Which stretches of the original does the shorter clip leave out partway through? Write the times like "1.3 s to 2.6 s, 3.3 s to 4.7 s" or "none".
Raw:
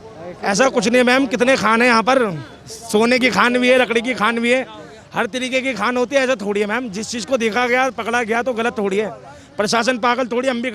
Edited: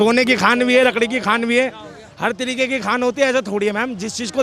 none